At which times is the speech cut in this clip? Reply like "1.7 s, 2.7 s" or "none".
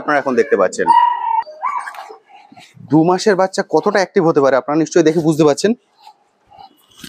1.4 s